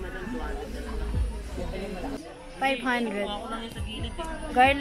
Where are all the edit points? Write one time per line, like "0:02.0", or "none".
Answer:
0:02.2